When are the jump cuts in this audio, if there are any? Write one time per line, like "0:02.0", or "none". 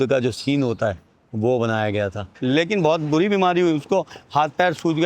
0:02.3